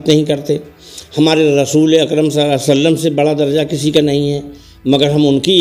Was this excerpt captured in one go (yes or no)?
yes